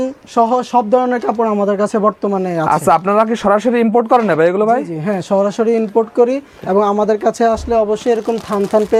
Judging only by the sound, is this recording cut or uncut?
uncut